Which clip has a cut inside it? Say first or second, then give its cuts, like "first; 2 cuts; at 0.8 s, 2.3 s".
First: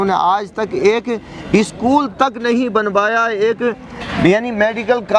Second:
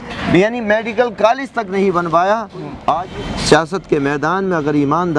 second; 1 cut; at 3.1 s